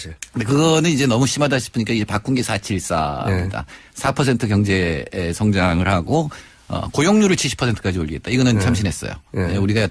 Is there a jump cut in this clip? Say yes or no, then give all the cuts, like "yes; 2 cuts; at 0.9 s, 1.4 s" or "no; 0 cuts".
no; 0 cuts